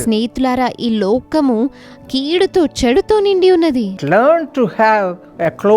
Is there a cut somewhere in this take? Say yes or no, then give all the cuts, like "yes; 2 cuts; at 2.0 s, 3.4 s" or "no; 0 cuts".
yes; 1 cut; at 3.9 s